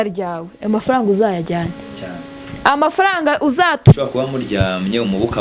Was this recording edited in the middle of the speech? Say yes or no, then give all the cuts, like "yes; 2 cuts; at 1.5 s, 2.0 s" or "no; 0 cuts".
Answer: yes; 1 cut; at 3.8 s